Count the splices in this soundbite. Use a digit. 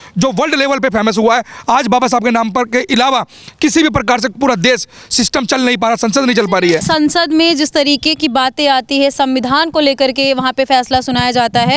1